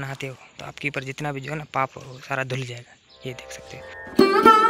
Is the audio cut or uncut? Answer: cut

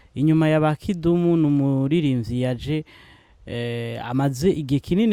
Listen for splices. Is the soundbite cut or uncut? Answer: uncut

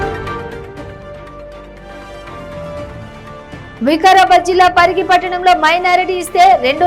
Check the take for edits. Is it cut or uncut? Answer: cut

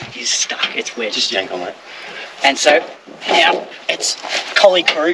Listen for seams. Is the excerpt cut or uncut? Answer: uncut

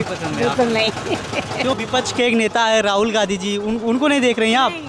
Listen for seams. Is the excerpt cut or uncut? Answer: cut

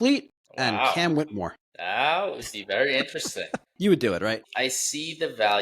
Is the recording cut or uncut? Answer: cut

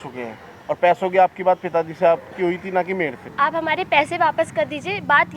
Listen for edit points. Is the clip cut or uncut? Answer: cut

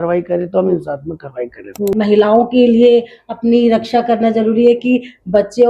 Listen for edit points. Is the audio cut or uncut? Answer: cut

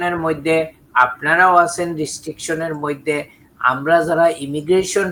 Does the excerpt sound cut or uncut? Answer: uncut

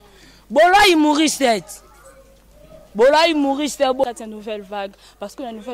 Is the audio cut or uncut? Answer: cut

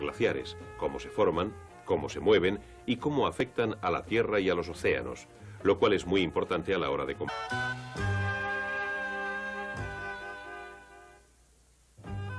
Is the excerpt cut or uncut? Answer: uncut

